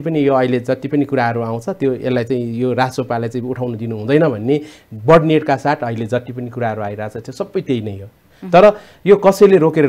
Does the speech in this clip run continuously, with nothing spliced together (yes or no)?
yes